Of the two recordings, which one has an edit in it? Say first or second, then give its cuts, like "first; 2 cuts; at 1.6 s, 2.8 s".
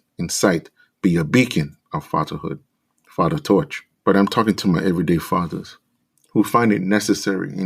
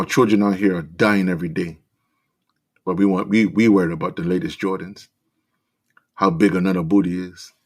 first; 1 cut; at 3.8 s